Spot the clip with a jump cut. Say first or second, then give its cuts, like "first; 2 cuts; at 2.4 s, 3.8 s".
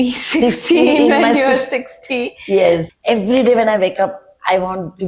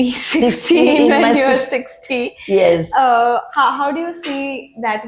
first; 1 cut; at 2.9 s